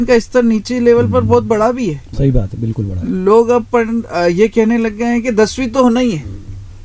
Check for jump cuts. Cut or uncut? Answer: uncut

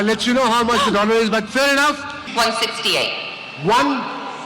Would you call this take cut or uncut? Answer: cut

